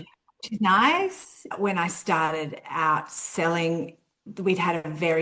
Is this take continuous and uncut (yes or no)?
no